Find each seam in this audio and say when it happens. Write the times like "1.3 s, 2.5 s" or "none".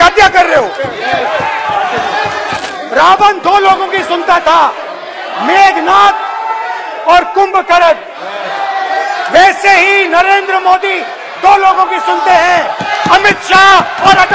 2.6 s